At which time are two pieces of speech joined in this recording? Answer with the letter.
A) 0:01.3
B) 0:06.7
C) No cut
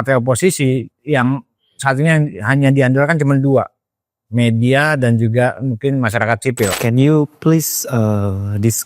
B